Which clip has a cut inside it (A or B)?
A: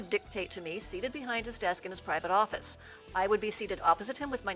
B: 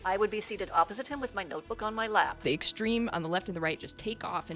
B